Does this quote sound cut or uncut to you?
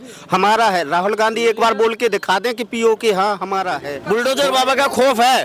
cut